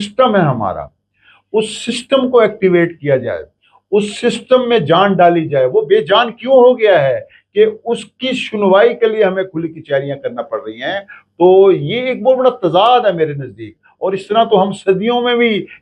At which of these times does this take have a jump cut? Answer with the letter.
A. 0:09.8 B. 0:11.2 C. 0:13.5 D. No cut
D